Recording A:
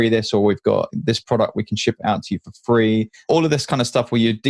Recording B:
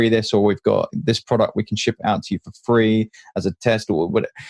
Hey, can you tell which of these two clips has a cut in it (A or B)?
A